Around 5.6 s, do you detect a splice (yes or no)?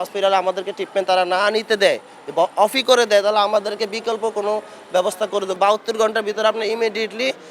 yes